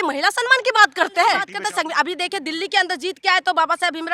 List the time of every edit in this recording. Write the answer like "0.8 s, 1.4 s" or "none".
1.5 s